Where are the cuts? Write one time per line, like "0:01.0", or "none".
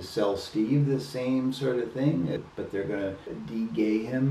0:02.4
0:03.2